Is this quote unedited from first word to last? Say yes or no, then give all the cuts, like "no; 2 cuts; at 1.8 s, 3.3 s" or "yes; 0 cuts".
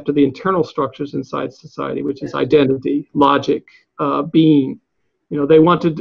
yes; 0 cuts